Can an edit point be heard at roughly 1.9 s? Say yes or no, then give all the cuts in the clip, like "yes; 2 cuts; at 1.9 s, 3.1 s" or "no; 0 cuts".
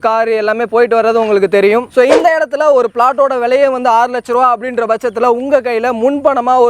yes; 1 cut; at 1.9 s